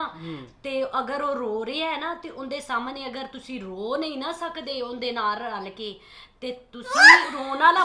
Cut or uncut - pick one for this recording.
uncut